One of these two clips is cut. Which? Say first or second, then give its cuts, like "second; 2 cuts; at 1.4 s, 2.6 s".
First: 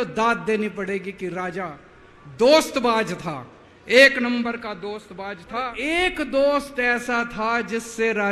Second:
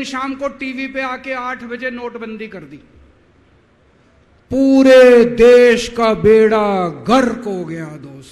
first; 1 cut; at 5.7 s